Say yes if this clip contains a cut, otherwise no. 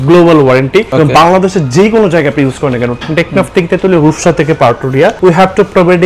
yes